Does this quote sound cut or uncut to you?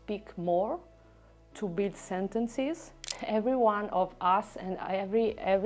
cut